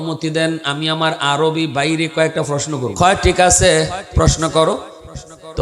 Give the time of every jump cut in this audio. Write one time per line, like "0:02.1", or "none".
0:02.9